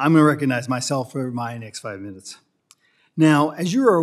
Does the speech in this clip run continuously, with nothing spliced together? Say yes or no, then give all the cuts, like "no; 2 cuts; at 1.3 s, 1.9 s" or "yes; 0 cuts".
yes; 0 cuts